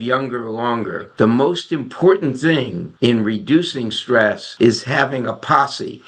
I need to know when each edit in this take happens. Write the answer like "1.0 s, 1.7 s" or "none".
1.0 s, 2.8 s, 4.4 s

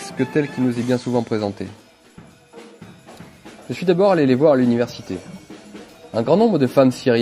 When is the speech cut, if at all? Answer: 6.1 s

